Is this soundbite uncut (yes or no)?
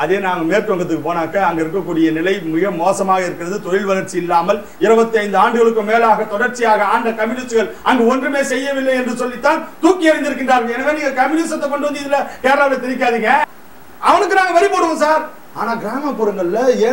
no